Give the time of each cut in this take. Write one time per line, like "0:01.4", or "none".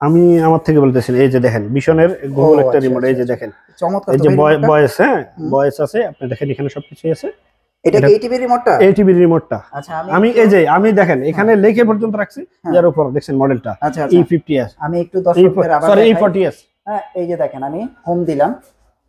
none